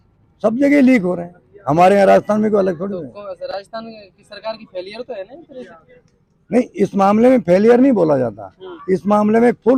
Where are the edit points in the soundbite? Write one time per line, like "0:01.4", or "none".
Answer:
none

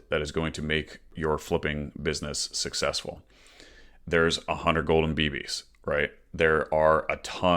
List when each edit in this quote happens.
0:01.1

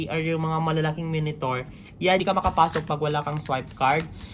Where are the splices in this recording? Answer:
0:02.2

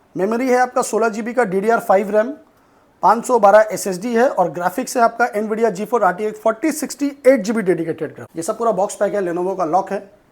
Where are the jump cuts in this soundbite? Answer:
0:08.3

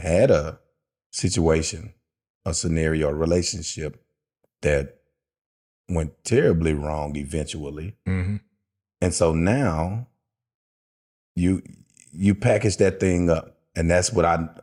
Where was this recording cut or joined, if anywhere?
none

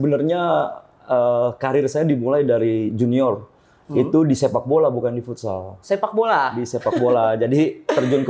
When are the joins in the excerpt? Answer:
none

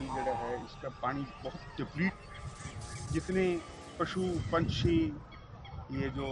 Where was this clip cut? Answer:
0:02.2

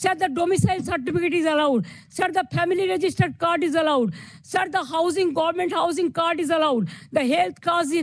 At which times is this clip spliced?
none

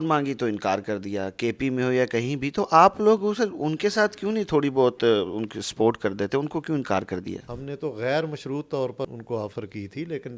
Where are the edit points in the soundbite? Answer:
0:07.5
0:09.1

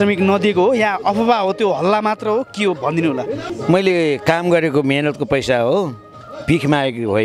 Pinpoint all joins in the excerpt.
0:03.5

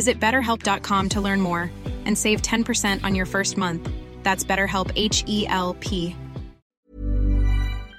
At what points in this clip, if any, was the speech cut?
0:06.8

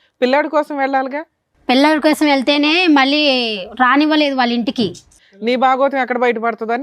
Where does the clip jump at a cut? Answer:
0:05.1

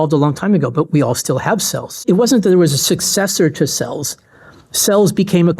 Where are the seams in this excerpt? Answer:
0:02.0

